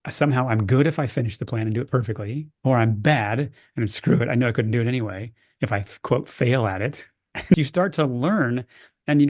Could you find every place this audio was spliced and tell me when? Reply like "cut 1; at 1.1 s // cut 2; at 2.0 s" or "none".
cut 1; at 7.5 s